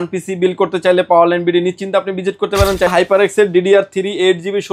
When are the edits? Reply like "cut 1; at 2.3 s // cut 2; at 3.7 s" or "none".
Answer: cut 1; at 2.9 s